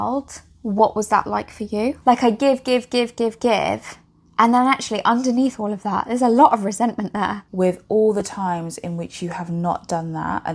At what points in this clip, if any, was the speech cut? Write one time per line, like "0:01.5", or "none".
0:02.0
0:07.4